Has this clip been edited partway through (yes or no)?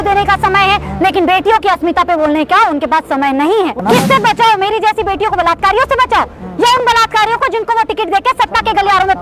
yes